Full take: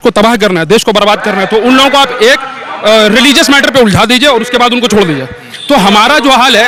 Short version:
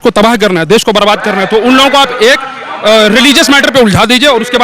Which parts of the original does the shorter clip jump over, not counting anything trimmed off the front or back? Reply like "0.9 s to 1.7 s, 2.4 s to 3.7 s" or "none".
none